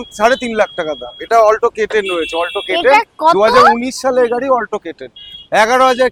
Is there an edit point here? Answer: no; 0 cuts

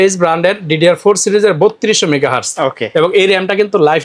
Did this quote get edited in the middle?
no; 0 cuts

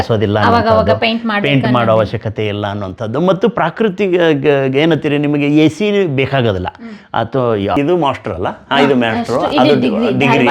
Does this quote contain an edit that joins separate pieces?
yes; 1 cut; at 7.8 s

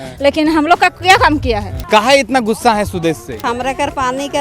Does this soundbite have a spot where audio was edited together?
yes; 2 cuts; at 1.7 s, 3.4 s

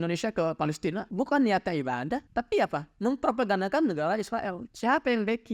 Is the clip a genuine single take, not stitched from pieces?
no; 2 cuts; at 1.1 s, 2.3 s

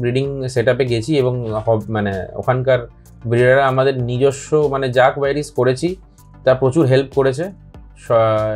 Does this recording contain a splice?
no; 0 cuts

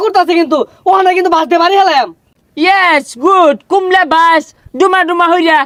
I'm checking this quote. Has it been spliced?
no; 0 cuts

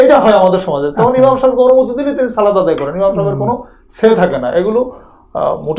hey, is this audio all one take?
yes; 0 cuts

